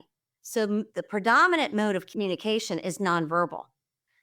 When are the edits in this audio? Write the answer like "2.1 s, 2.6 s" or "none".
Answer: 2.1 s